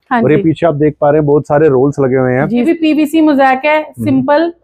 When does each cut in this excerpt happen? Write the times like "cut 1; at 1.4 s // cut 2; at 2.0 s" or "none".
cut 1; at 2.6 s